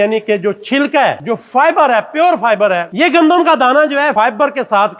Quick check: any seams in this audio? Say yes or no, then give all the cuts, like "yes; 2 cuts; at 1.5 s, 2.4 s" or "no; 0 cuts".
yes; 3 cuts; at 1.2 s, 2.9 s, 4.1 s